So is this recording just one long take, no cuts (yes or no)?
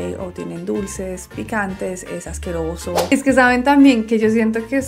no